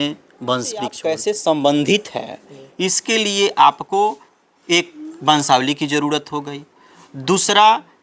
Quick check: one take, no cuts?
no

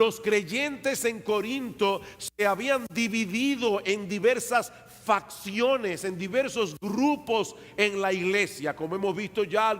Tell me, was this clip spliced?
yes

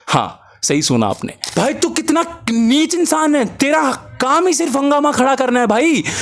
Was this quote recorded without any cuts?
no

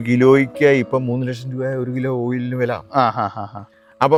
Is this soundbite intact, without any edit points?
yes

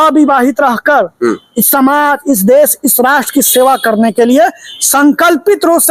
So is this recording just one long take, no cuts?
yes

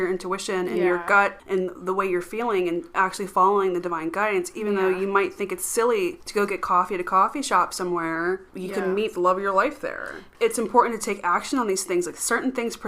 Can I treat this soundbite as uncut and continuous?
no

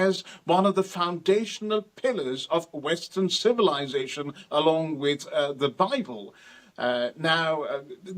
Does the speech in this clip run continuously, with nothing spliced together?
yes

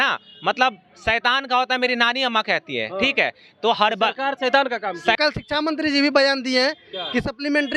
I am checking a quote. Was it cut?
yes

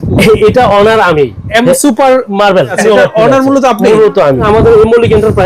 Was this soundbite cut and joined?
yes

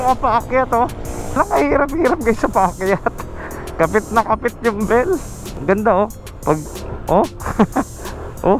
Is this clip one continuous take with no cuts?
no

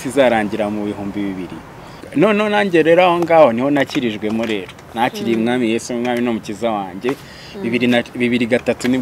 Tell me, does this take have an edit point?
yes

